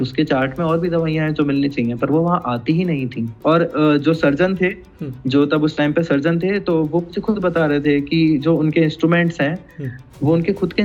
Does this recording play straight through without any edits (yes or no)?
yes